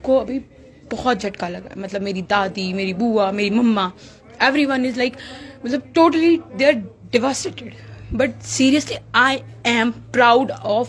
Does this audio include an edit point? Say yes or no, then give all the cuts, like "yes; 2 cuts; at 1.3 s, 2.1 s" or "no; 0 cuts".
no; 0 cuts